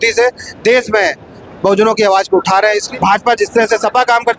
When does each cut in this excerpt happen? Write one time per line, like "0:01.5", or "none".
0:02.9